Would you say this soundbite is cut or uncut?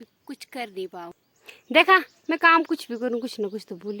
cut